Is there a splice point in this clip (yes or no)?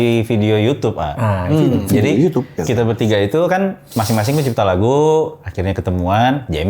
yes